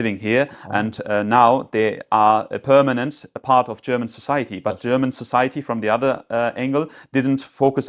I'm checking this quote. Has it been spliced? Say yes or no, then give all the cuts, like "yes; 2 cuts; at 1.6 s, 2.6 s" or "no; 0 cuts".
no; 0 cuts